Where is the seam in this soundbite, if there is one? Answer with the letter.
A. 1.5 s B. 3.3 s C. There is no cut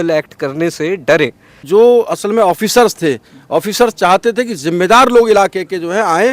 A